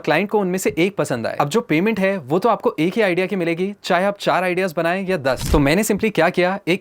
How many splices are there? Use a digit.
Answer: 1